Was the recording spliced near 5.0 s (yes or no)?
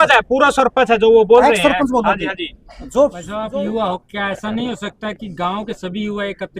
no